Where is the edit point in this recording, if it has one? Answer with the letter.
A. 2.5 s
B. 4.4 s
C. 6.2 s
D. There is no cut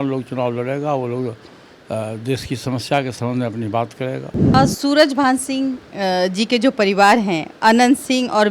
B